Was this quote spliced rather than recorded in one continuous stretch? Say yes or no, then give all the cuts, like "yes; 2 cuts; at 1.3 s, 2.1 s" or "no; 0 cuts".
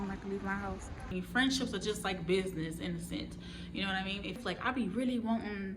yes; 2 cuts; at 1.1 s, 4.4 s